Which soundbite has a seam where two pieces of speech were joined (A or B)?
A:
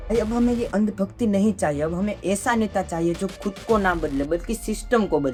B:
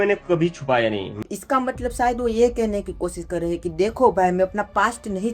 B